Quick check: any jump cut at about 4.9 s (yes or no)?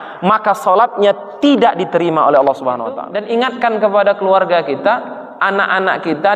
no